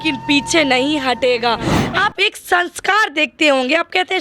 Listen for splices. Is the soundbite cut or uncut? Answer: cut